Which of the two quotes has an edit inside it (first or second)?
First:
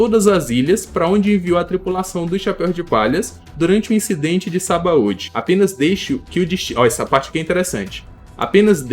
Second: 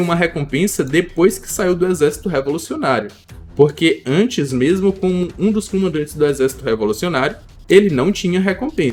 first